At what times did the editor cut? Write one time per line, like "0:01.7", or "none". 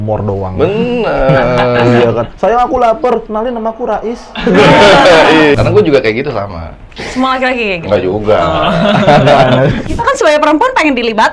0:05.5
0:09.8

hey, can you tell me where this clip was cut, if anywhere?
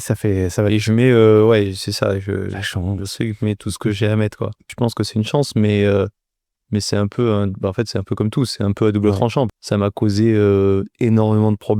0:04.7
0:09.5

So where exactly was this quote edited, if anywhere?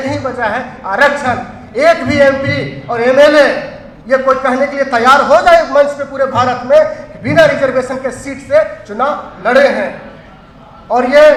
none

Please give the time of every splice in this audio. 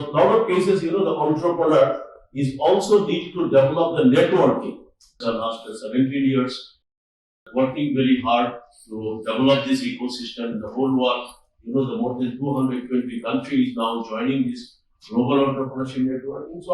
0:05.2

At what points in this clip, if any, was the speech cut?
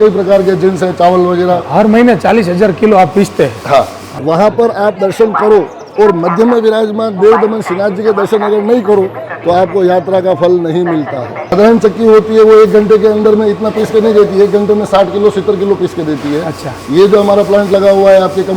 0:04.1
0:11.5

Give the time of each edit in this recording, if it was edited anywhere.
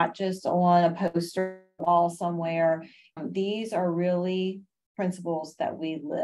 0:03.2

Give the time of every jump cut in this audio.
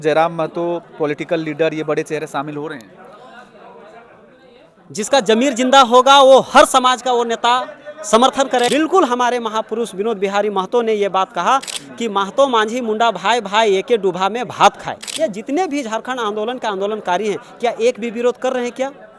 0:08.7
0:11.8
0:15.0

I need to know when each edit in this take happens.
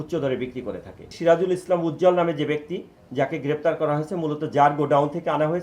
0:01.0

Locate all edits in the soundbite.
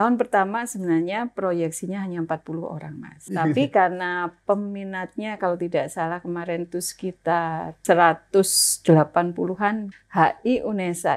0:03.3
0:07.7
0:09.9

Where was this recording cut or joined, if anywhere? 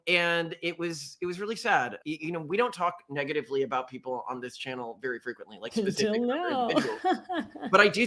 0:02.0

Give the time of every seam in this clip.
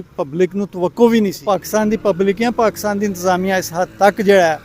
0:01.4

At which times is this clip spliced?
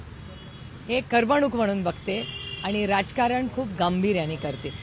none

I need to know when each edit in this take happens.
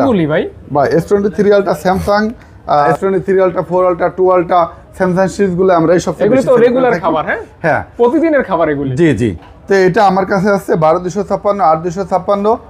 none

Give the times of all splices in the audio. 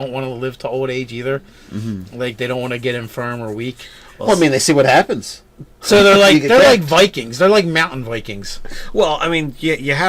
0:01.1

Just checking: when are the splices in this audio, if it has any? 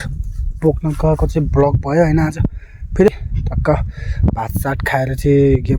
0:03.1

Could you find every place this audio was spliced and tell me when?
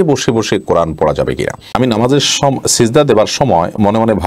0:01.7

